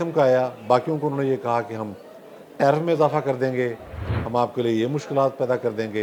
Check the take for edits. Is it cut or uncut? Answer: uncut